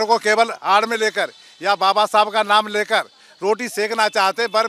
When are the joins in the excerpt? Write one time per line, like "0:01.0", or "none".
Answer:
none